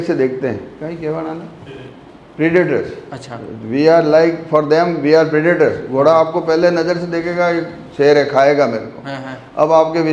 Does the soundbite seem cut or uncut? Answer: uncut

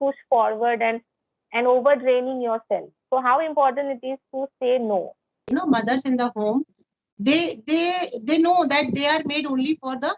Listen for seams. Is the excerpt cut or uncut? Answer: cut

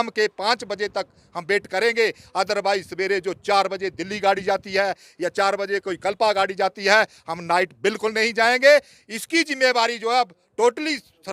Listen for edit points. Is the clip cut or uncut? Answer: uncut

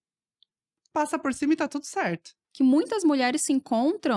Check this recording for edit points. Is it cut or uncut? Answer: cut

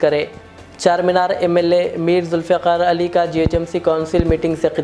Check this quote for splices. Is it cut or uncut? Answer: uncut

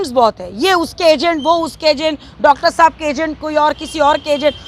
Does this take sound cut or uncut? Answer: uncut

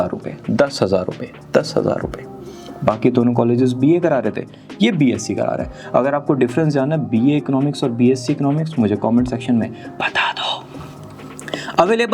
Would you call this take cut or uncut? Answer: uncut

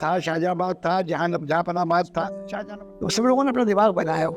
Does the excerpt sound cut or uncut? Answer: cut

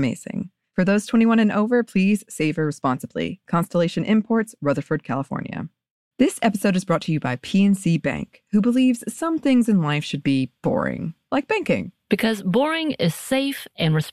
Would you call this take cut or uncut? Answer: uncut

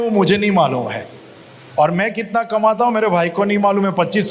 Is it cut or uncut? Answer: uncut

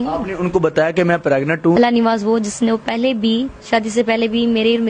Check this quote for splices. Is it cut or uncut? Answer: cut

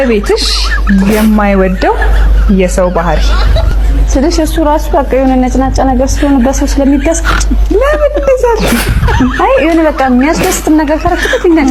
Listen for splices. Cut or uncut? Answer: uncut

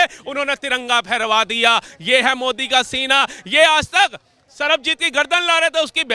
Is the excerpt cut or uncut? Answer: uncut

